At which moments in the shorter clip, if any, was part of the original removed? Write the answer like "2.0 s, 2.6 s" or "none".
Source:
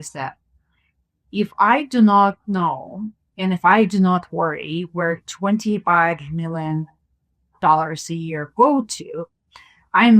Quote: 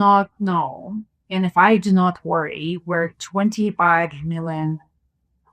none